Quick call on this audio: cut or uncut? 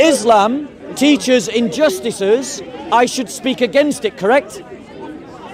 uncut